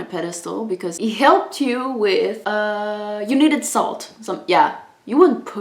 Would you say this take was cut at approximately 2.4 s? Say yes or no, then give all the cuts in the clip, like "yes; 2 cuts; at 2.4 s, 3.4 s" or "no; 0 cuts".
yes; 2 cuts; at 0.9 s, 2.4 s